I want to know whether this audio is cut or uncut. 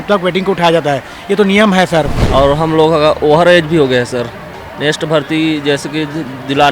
cut